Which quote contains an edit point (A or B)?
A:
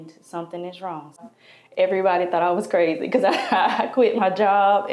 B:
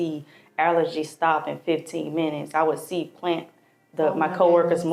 A